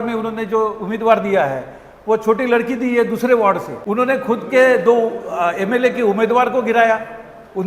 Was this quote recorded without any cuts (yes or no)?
no